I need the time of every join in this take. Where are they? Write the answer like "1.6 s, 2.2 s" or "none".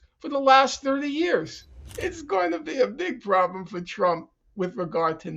1.9 s